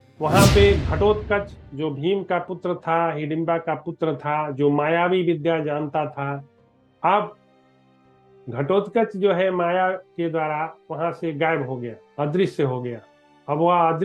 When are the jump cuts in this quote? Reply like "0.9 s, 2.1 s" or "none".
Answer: none